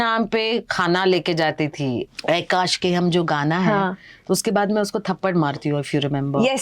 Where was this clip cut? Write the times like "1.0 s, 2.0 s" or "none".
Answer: 2.0 s